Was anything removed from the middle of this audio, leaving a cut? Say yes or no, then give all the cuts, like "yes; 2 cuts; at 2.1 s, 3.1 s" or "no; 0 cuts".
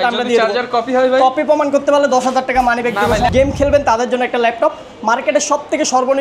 yes; 1 cut; at 3.3 s